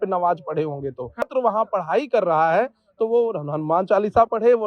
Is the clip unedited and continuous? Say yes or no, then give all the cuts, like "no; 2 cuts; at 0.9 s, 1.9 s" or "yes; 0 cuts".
no; 1 cut; at 1.3 s